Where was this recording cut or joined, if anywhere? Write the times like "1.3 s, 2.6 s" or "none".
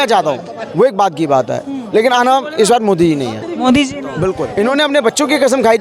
4.4 s

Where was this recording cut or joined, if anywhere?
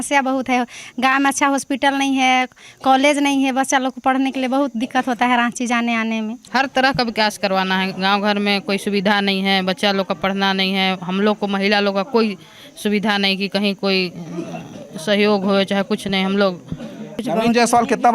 6.4 s, 17.2 s

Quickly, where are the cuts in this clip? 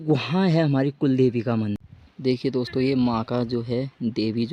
1.8 s

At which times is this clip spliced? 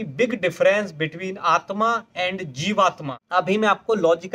3.1 s

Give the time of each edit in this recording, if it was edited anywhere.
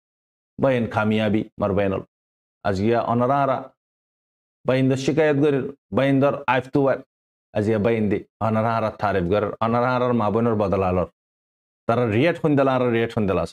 none

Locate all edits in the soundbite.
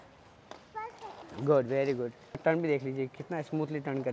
2.4 s

